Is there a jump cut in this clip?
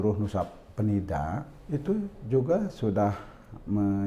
yes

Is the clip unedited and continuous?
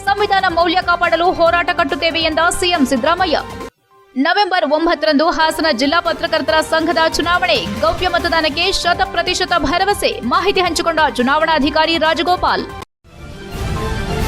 no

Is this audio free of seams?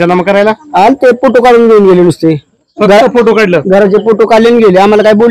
yes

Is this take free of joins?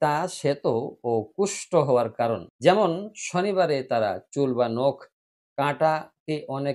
no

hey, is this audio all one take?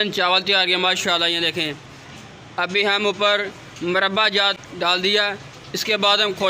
no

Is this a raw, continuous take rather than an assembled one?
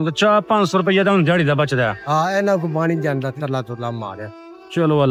yes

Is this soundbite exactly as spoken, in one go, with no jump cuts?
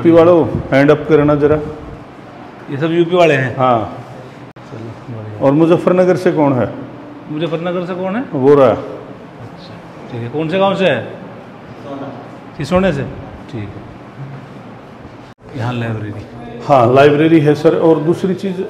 yes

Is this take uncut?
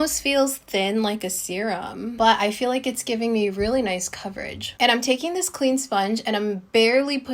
yes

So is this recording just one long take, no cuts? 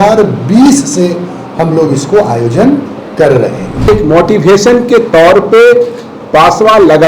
no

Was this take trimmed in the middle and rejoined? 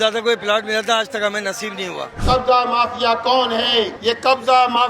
yes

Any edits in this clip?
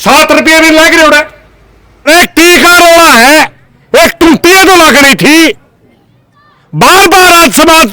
yes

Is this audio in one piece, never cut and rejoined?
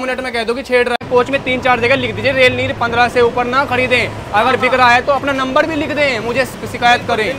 no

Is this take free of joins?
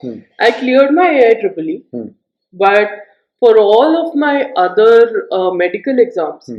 yes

